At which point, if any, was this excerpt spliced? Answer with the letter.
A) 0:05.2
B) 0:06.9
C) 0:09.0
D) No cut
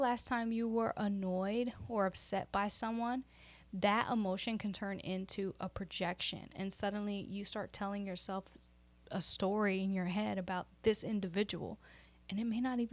D